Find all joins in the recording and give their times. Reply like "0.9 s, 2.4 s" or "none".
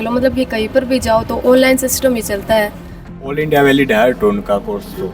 3.3 s

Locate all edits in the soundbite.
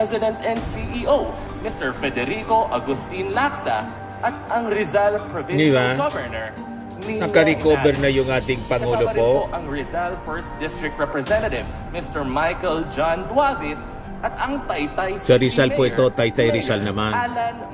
none

